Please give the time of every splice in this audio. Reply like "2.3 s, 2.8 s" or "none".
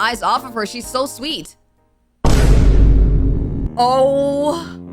3.7 s